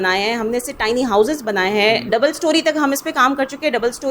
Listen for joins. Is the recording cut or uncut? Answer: cut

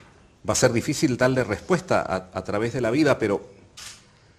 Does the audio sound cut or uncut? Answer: cut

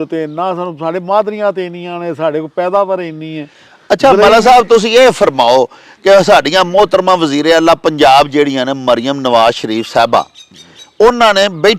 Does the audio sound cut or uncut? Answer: uncut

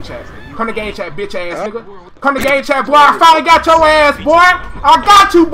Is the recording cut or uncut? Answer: uncut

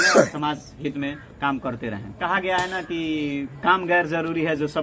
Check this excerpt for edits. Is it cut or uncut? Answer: uncut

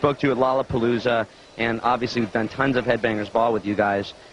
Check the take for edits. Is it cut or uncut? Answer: uncut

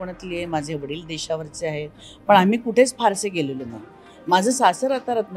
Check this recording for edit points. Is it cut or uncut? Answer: uncut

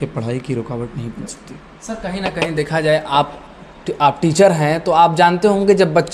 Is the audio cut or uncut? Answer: uncut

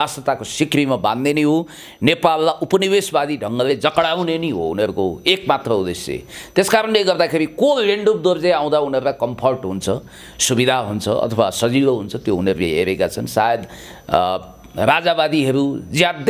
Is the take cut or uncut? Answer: uncut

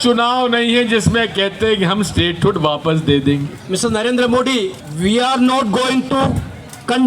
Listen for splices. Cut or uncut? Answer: cut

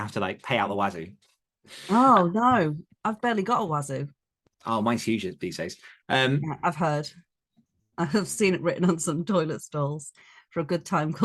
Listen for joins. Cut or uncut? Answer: uncut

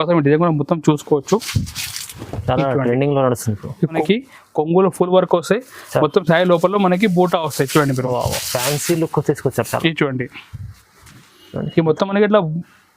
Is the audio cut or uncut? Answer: cut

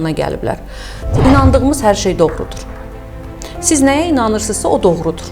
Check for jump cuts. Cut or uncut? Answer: cut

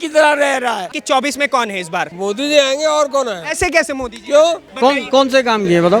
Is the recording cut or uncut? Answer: cut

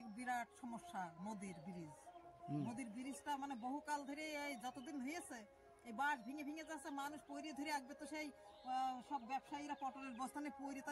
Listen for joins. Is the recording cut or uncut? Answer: uncut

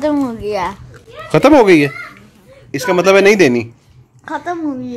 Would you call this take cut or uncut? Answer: uncut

